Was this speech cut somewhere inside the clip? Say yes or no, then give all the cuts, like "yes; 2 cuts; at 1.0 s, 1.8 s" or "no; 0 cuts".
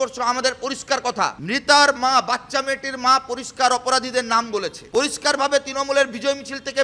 yes; 2 cuts; at 1.4 s, 4.8 s